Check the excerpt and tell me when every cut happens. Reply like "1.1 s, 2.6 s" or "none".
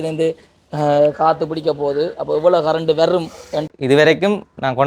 3.6 s